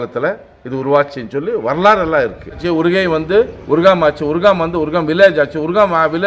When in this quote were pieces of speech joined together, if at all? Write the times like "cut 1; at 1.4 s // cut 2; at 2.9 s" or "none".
cut 1; at 2.6 s